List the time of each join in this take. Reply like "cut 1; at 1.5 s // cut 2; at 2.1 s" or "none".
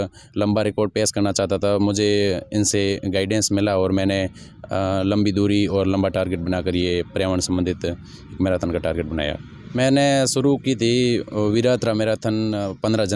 cut 1; at 9.5 s